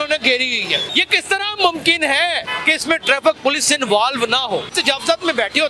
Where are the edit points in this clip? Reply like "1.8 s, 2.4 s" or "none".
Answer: 0.9 s, 2.5 s, 4.7 s